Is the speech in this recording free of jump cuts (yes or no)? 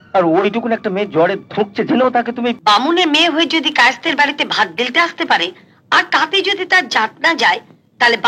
no